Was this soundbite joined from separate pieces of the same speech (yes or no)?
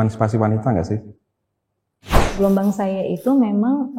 yes